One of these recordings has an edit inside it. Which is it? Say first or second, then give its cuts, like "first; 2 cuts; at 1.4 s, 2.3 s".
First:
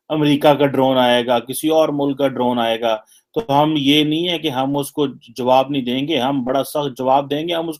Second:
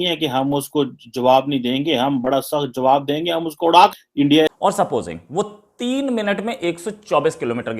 second; 1 cut; at 4.5 s